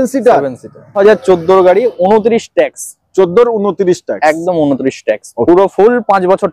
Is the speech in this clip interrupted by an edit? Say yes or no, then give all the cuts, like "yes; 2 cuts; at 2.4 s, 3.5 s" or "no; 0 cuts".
yes; 1 cut; at 0.9 s